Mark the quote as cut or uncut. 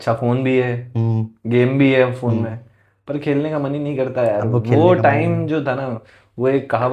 uncut